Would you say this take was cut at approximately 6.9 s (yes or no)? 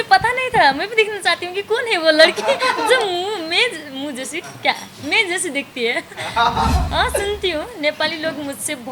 yes